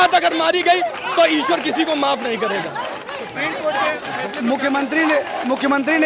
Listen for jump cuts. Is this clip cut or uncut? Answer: uncut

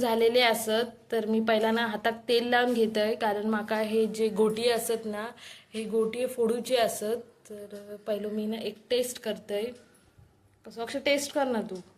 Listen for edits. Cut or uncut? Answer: uncut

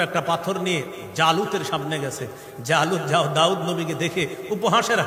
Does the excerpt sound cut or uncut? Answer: uncut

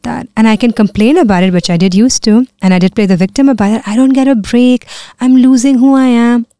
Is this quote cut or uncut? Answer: uncut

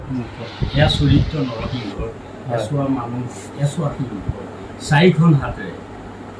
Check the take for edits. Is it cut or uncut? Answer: uncut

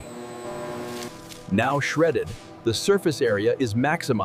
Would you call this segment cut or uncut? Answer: cut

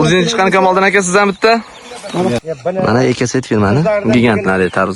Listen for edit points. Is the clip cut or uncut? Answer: cut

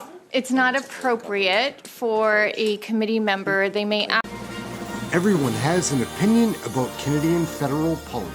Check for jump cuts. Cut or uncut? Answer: cut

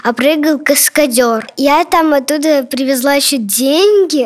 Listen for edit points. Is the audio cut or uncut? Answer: cut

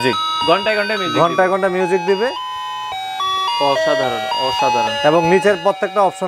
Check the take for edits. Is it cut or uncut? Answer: uncut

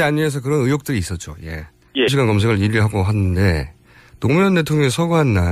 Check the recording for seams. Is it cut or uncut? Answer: uncut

